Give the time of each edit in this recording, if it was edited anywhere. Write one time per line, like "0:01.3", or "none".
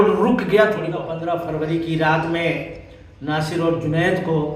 0:01.1